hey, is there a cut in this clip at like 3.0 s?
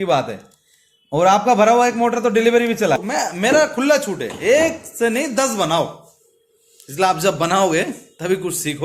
yes; 1 cut; at 3.0 s

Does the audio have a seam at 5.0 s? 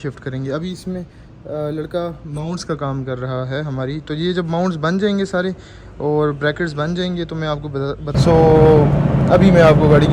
no; 1 cut; at 8.1 s

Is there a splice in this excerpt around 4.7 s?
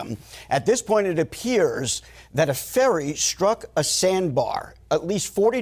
yes; 1 cut; at 4.7 s

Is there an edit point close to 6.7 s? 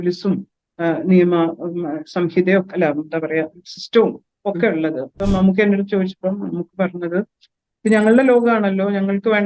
no; 1 cut; at 5.1 s

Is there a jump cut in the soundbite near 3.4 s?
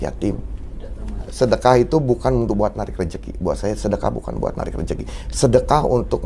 no; 1 cut; at 1.2 s

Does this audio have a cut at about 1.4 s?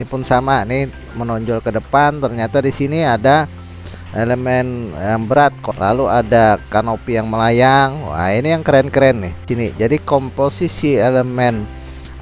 no; 2 cuts; at 5.7 s, 9.5 s

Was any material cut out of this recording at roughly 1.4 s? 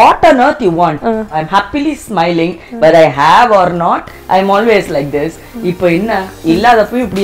yes; 1 cut; at 1.4 s

